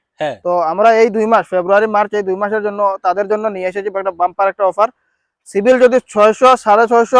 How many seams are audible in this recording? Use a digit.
0